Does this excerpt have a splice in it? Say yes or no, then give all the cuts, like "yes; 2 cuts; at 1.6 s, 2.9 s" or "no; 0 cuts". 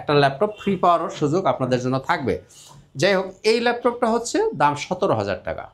no; 0 cuts